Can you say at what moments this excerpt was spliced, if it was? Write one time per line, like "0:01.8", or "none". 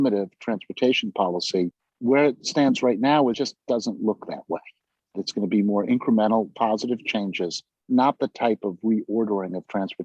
0:01.9
0:05.2